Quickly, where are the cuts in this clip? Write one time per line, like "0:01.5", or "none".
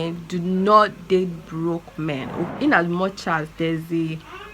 0:02.2